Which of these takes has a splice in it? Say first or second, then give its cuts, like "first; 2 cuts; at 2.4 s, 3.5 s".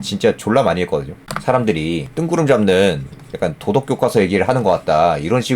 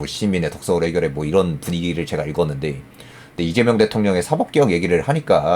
first; 1 cut; at 1.6 s